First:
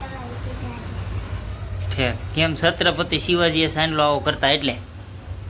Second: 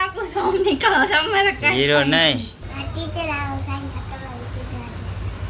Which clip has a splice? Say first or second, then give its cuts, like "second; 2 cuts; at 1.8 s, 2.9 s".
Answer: second; 1 cut; at 2.6 s